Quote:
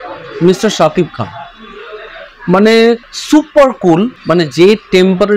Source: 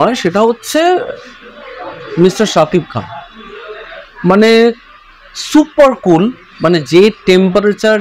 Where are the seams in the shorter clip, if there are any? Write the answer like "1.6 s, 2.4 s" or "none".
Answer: 3.1 s, 4.2 s